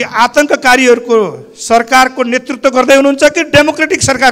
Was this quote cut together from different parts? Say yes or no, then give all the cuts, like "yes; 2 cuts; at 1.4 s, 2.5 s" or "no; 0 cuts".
no; 0 cuts